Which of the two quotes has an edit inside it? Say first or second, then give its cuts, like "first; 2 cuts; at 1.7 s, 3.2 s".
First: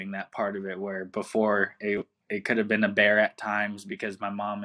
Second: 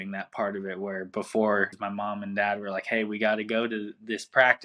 second; 1 cut; at 1.8 s